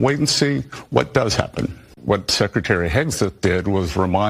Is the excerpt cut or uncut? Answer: cut